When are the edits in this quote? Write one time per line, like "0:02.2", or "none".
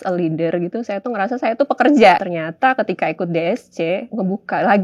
0:02.2
0:04.1